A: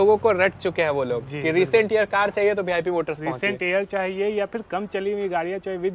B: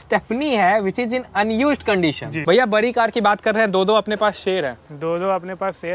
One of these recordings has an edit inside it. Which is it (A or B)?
B